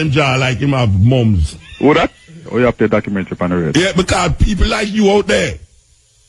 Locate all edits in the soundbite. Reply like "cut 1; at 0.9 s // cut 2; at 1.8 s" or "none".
cut 1; at 2.4 s